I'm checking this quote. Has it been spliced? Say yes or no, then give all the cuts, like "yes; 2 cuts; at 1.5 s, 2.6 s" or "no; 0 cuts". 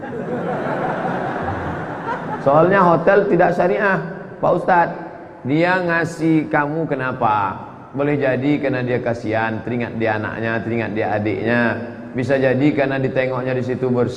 no; 0 cuts